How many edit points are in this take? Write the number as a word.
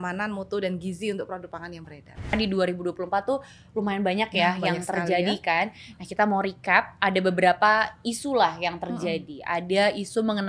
one